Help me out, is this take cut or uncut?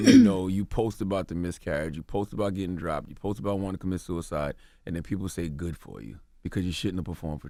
uncut